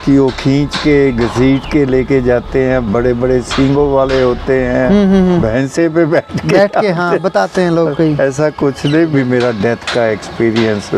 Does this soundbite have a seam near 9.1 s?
yes; 1 cut; at 9.1 s

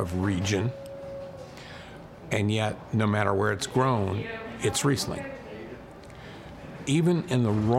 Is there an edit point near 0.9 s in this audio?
no; 0 cuts

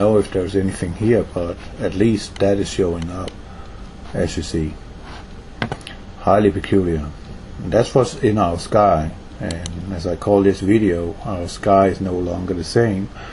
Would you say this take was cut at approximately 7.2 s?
no; 1 cut; at 2.3 s

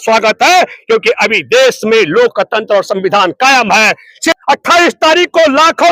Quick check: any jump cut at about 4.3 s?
yes; 1 cut; at 4.3 s

